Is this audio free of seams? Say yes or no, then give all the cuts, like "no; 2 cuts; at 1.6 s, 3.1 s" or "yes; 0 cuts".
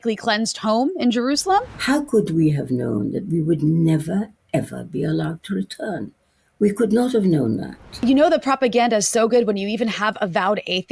no; 2 cuts; at 1.7 s, 8.0 s